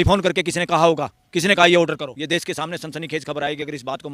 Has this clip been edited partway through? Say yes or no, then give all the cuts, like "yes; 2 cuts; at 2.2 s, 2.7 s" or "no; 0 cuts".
yes; 1 cut; at 2.1 s